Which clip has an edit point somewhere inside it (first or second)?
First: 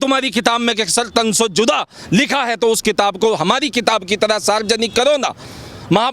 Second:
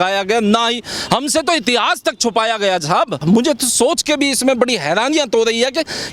second